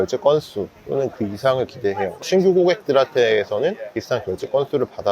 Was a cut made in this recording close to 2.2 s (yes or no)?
yes